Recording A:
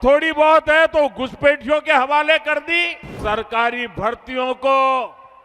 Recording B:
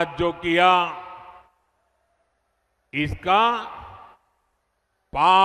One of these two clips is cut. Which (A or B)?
A